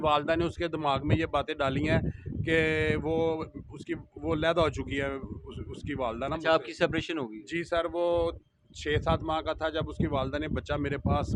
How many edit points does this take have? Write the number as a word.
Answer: zero